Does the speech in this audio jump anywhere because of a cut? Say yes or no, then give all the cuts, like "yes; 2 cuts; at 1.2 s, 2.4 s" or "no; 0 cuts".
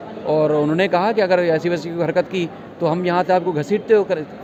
no; 0 cuts